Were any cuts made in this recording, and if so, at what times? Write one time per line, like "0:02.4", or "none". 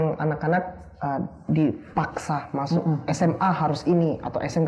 none